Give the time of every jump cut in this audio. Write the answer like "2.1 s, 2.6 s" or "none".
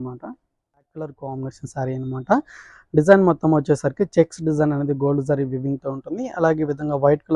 1.1 s